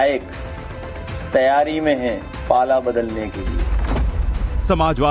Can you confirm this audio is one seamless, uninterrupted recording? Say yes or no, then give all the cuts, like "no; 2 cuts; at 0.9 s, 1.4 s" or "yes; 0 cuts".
no; 1 cut; at 1.7 s